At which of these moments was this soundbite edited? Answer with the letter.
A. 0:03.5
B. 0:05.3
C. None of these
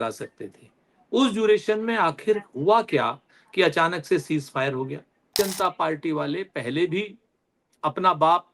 B